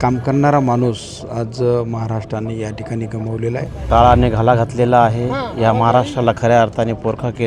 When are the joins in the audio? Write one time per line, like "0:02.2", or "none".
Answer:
0:03.8